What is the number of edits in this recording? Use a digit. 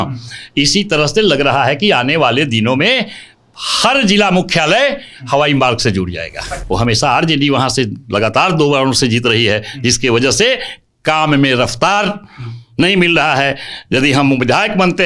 1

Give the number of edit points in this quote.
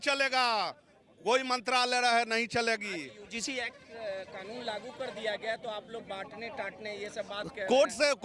0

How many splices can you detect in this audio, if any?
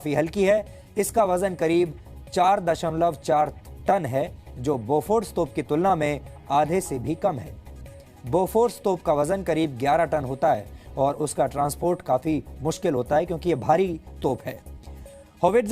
1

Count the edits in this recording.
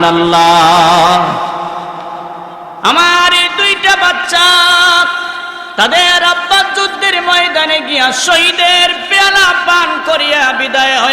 1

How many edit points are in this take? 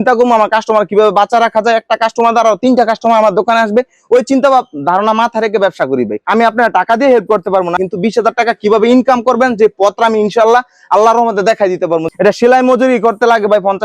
2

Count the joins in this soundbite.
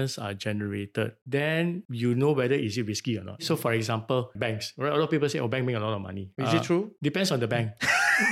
3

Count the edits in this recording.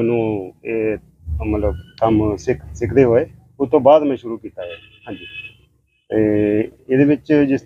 0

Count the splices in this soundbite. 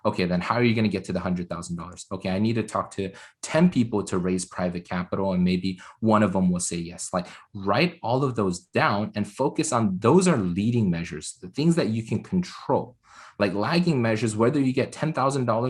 0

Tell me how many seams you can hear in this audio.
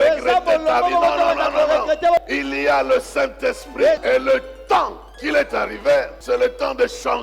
4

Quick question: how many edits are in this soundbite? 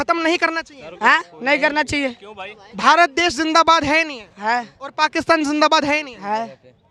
0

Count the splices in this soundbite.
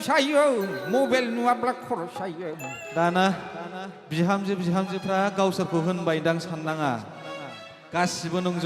1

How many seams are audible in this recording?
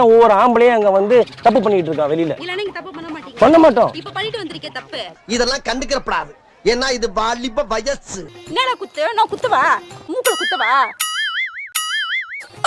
1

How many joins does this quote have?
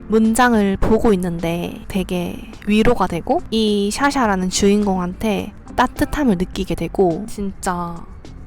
1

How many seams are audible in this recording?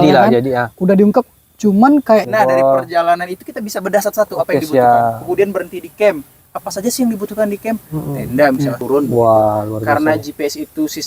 2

